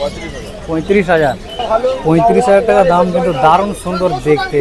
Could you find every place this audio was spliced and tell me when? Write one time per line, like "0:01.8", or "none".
0:01.5